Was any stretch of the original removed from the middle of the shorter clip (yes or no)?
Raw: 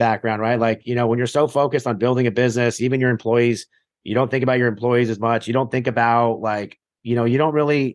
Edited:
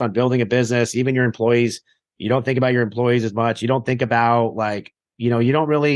no